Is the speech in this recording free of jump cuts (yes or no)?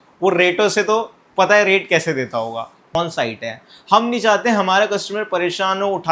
no